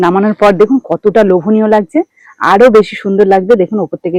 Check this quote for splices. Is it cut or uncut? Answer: uncut